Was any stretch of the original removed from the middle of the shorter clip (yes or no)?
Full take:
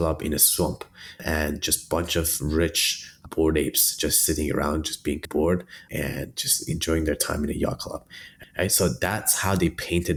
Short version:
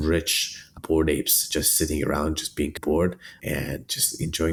no